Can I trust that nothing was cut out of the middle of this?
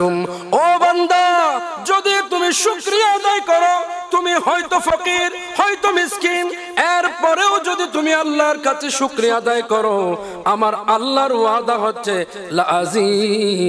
yes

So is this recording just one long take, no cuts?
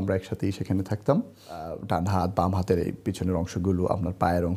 no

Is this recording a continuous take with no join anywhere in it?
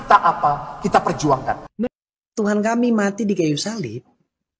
no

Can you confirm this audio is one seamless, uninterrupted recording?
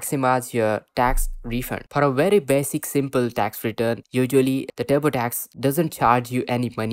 no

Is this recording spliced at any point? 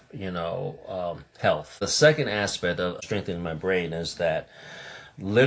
yes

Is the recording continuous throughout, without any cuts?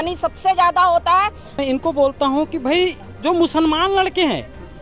no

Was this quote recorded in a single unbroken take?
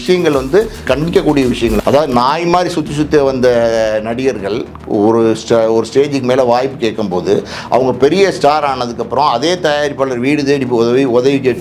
no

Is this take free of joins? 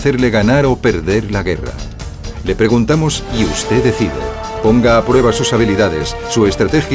no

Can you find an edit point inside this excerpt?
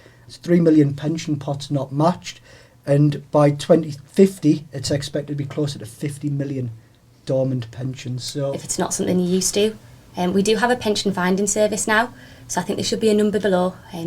yes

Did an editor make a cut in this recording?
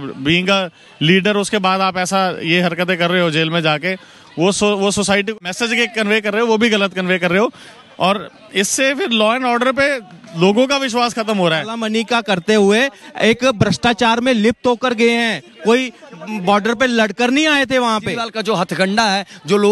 yes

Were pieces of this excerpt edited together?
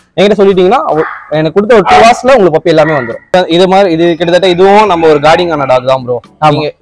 yes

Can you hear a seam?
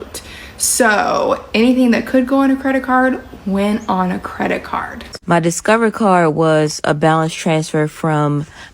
yes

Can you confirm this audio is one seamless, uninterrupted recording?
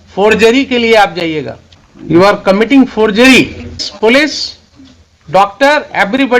no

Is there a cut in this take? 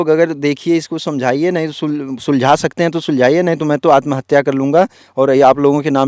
no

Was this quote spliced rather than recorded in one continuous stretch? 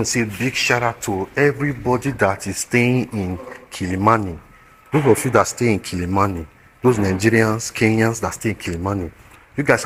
no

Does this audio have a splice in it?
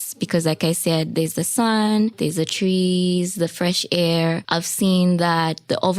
yes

